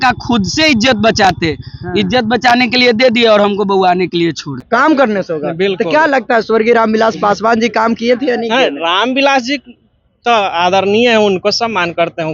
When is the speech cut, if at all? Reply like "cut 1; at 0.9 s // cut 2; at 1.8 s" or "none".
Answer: cut 1; at 4.5 s